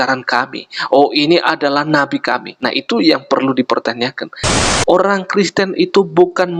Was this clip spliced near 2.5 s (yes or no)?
yes